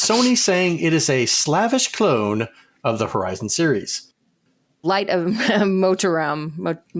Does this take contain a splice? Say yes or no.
yes